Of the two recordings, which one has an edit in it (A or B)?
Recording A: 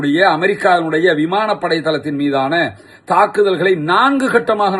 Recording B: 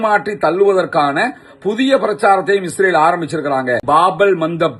B